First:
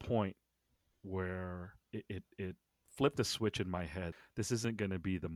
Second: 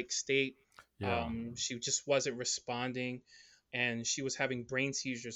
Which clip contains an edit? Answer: first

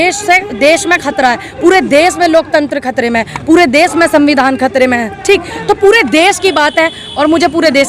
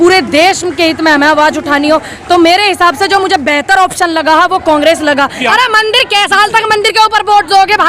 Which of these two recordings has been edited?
second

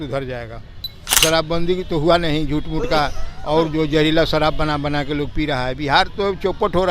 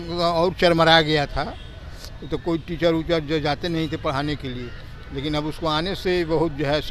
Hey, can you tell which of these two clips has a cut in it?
first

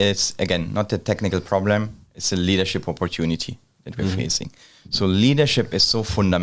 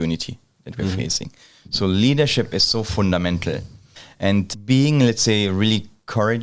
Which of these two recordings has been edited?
second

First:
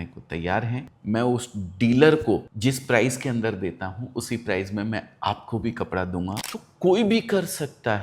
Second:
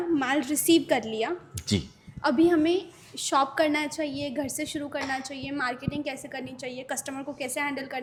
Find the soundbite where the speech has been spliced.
first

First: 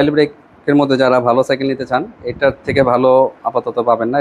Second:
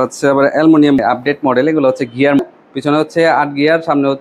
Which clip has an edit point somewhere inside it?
second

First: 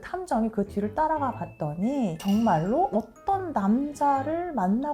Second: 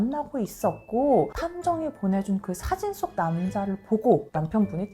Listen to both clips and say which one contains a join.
second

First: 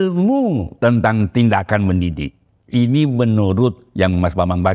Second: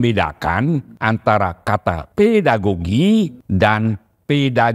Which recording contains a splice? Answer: second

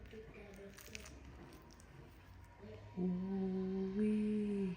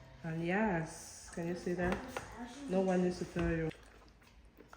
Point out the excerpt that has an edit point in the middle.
second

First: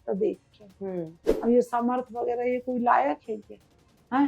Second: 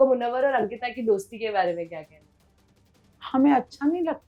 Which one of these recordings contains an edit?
first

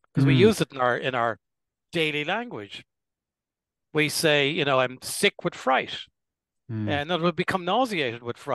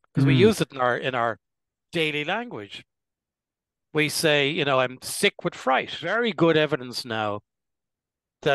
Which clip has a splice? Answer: second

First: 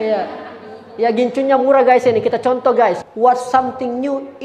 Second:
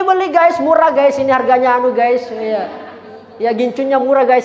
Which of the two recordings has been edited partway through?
first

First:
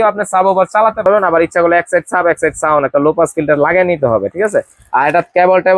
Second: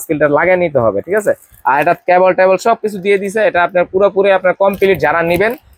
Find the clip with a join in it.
first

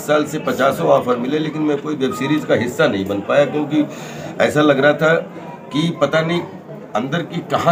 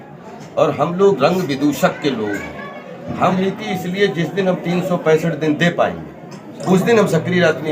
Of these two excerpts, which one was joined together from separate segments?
second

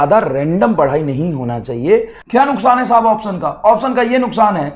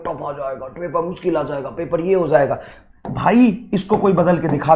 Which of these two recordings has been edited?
first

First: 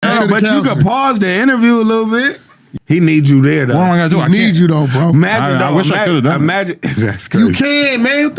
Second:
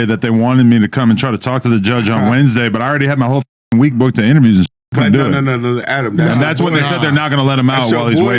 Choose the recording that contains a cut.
first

